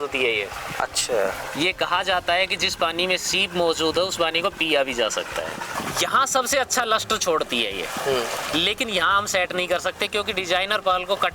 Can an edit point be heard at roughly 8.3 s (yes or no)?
no